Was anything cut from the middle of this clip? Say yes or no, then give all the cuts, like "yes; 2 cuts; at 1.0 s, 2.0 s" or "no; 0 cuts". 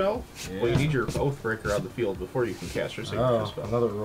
no; 0 cuts